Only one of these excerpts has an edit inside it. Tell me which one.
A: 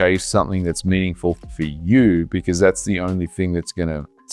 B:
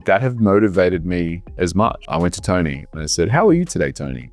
B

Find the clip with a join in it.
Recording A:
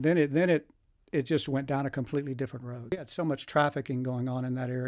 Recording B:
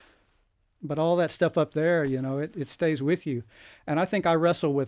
A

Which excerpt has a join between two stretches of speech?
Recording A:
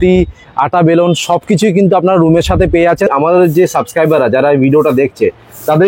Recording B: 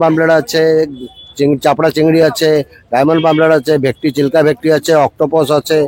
A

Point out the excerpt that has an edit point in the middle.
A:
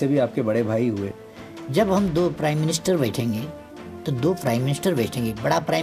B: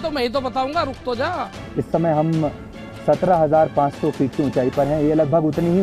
B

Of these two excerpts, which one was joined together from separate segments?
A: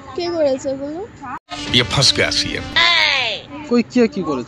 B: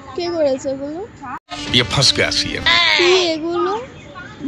B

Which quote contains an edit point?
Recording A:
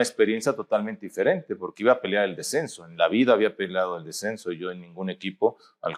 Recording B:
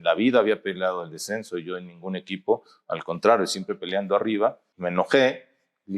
B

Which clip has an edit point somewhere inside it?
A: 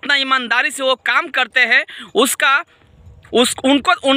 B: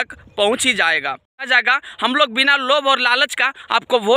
B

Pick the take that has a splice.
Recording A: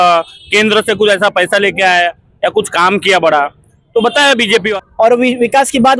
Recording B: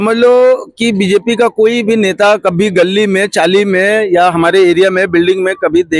A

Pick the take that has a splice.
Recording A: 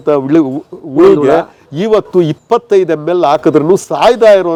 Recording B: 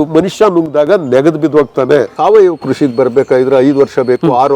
B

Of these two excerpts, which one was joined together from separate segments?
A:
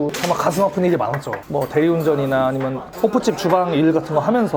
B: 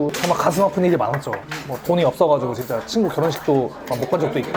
A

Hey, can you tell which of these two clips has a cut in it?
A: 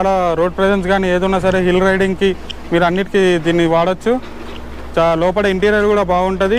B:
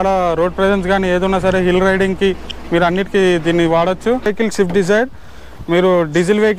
B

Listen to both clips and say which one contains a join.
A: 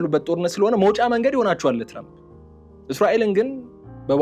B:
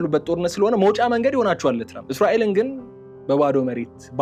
B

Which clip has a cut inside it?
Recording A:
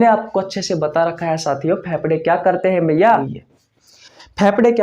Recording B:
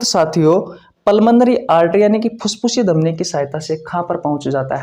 A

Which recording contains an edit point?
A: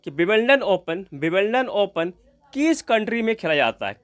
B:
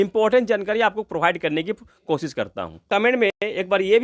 B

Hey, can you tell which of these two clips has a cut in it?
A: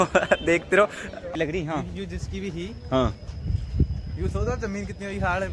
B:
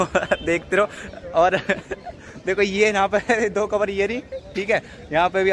A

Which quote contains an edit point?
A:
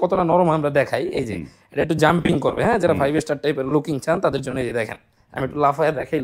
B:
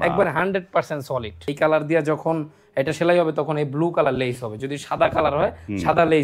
B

